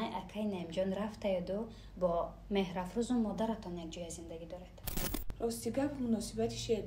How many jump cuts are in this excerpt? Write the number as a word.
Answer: one